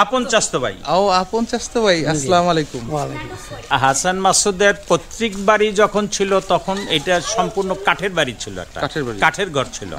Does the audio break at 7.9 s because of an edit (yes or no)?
no